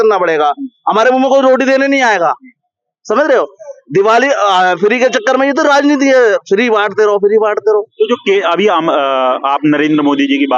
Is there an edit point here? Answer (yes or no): no